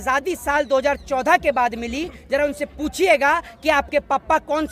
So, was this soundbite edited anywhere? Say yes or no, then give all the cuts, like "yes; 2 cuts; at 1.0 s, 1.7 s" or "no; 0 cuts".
no; 0 cuts